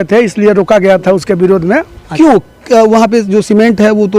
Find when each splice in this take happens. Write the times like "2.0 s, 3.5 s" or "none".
2.0 s